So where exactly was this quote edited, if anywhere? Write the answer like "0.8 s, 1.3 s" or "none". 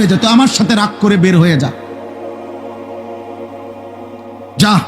2.4 s, 4.0 s